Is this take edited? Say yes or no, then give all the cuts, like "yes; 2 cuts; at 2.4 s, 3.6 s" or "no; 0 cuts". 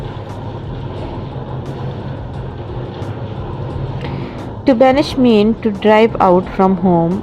yes; 1 cut; at 2.7 s